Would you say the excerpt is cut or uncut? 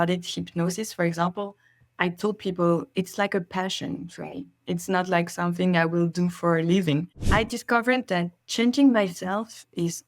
cut